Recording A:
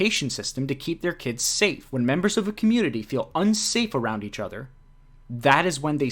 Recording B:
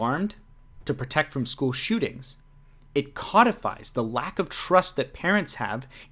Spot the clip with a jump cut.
A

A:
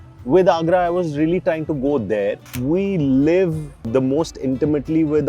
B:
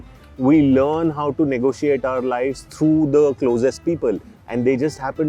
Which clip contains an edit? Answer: A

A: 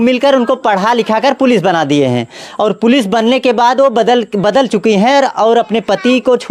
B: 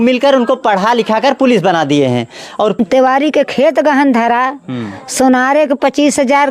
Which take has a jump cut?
B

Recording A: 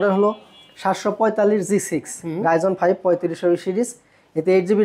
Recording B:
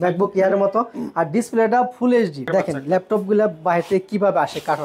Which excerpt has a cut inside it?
B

